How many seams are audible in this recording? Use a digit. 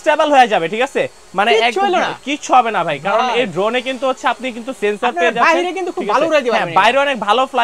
0